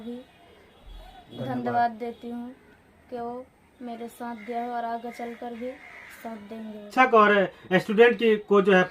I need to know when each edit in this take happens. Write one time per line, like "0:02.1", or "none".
0:06.8